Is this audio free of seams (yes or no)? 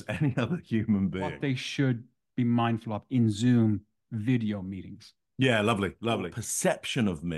no